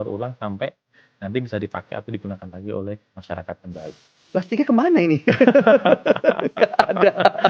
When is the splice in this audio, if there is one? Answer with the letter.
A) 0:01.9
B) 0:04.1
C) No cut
B